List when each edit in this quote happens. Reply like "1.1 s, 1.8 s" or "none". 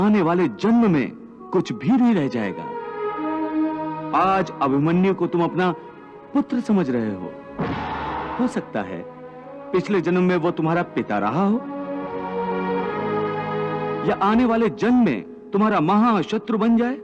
8.3 s